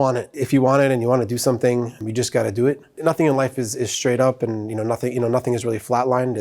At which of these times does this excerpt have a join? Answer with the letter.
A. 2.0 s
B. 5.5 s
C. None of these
A